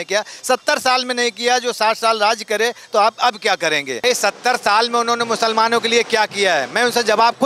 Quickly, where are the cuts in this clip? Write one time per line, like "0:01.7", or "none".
0:04.0